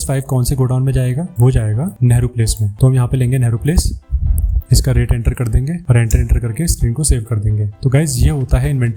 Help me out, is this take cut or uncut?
uncut